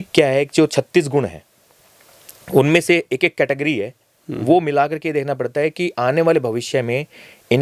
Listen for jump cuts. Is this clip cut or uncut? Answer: uncut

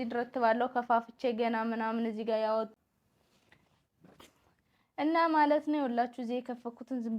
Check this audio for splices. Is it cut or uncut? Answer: cut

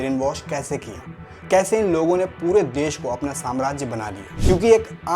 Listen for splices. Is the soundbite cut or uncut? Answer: cut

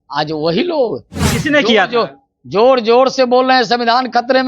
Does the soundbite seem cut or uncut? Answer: uncut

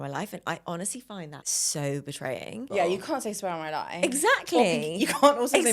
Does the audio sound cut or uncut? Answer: cut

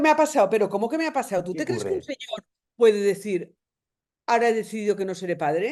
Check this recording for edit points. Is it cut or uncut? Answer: uncut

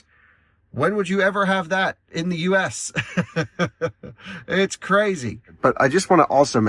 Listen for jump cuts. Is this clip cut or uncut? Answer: cut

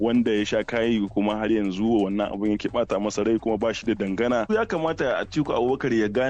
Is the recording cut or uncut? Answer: cut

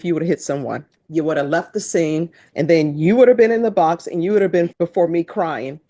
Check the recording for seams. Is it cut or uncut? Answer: cut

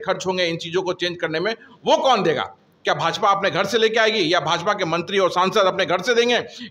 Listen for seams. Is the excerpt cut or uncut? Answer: uncut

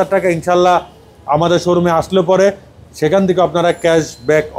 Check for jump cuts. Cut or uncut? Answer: uncut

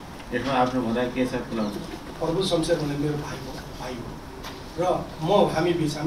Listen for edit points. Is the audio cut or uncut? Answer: cut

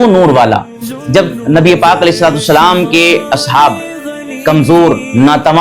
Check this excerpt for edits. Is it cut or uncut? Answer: cut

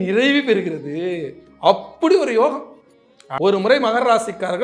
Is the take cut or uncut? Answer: cut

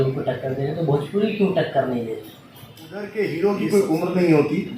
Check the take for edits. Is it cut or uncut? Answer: cut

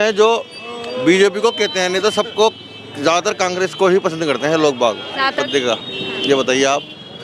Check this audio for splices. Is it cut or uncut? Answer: cut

